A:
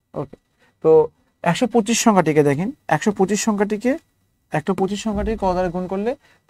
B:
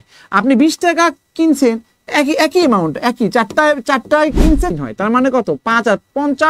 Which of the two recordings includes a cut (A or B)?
B